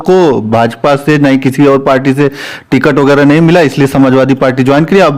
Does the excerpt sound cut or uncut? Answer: uncut